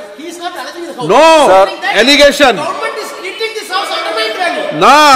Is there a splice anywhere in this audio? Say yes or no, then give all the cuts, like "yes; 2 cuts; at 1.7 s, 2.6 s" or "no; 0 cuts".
no; 0 cuts